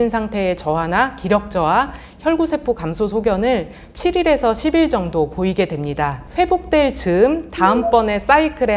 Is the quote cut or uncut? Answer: uncut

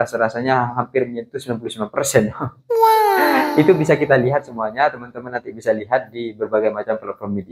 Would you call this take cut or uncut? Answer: uncut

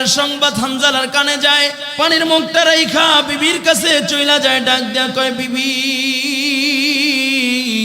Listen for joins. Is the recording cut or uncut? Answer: cut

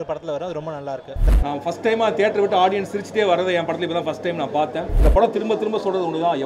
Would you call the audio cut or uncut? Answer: cut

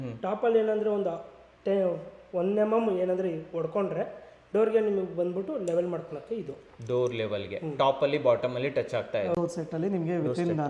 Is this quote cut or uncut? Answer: cut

